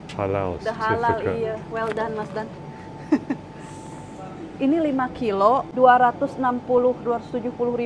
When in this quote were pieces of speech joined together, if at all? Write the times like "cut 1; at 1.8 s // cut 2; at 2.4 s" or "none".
cut 1; at 5.7 s